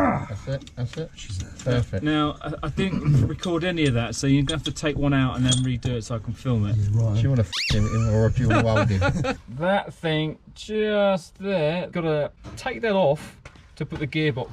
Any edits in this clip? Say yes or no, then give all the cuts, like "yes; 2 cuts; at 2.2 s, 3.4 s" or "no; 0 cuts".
yes; 2 cuts; at 9.4 s, 11.9 s